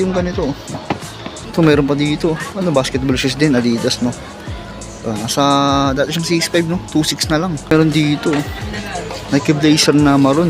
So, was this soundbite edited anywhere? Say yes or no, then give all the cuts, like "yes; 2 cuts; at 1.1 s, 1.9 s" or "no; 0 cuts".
yes; 2 cuts; at 1.4 s, 7.7 s